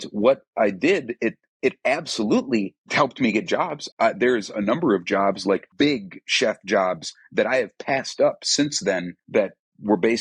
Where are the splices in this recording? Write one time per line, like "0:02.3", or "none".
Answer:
0:02.8
0:03.8
0:05.7
0:09.1